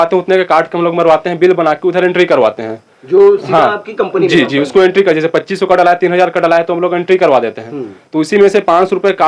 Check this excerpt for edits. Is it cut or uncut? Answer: uncut